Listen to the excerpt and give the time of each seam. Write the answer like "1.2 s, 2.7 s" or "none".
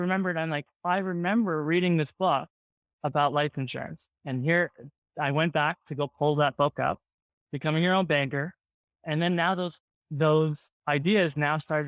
none